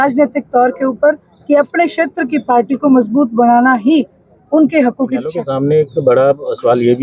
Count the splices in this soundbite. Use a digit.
1